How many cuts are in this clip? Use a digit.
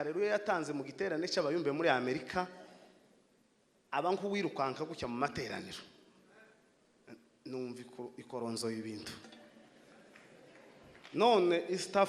0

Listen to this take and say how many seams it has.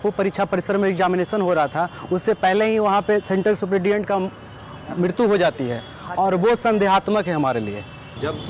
0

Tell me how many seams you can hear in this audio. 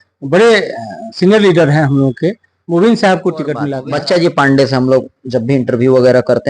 1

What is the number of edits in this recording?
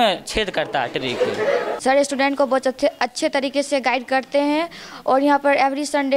1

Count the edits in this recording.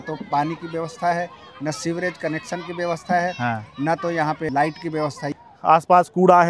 2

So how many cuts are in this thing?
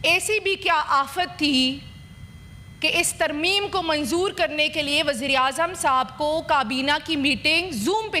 0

